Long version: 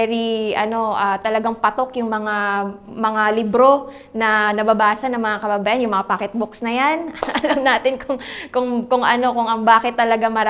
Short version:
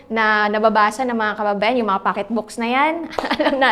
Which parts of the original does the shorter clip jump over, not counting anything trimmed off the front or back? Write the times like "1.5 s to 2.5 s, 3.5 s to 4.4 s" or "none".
none

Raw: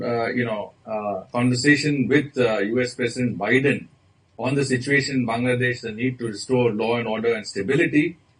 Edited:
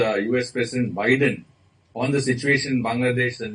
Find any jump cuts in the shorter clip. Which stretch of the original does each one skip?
none

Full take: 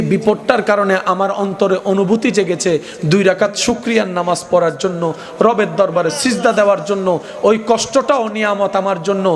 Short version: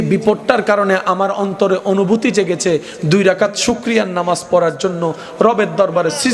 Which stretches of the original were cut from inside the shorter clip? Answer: none

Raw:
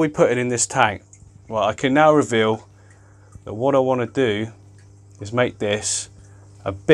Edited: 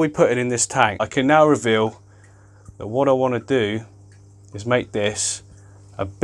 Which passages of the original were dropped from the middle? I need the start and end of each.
1.1 s to 1.7 s

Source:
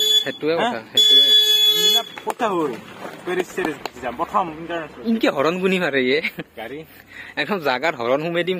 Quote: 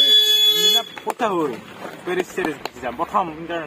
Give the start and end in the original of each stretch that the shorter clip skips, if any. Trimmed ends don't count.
none

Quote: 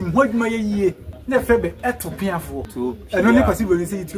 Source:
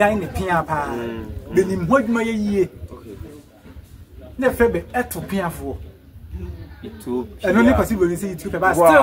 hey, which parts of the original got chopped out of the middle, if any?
2.8 s to 4.2 s, 5.8 s to 7.0 s

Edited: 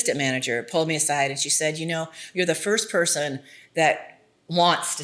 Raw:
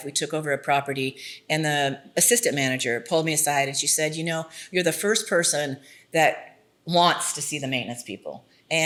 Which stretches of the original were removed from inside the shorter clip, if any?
none

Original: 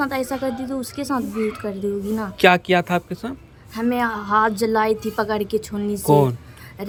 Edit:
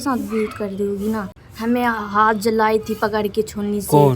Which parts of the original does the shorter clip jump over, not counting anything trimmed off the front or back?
2.3 s to 3.4 s

